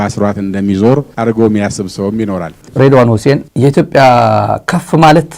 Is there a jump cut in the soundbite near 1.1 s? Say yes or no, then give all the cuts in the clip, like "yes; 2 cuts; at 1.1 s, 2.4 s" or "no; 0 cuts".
no; 1 cut; at 2.6 s